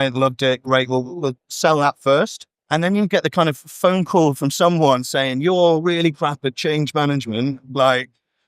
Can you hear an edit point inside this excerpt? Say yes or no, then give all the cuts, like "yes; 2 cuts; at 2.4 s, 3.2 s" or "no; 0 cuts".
yes; 1 cut; at 2.5 s